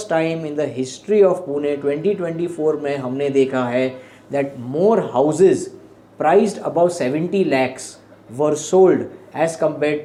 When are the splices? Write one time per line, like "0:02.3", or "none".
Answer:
none

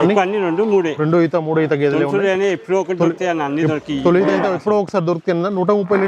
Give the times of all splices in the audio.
none

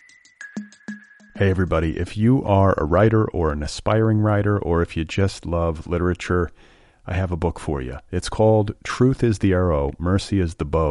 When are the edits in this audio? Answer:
0:00.9

